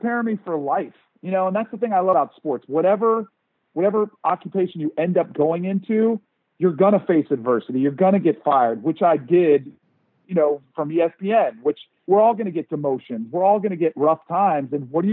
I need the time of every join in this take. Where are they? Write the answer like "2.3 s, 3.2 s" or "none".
2.1 s